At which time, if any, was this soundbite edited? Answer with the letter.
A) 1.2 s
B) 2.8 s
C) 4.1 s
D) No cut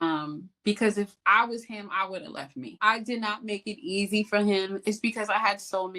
B